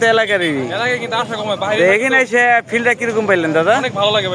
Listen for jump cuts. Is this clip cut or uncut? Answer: uncut